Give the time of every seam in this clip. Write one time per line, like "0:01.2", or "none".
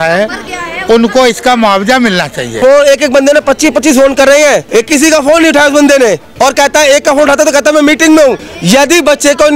0:02.5
0:04.6
0:06.3
0:08.5